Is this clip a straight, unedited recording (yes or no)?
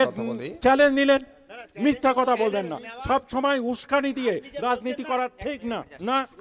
yes